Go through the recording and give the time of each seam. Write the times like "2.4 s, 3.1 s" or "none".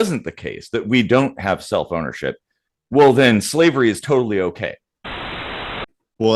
5.4 s